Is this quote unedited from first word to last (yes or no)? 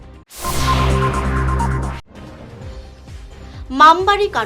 no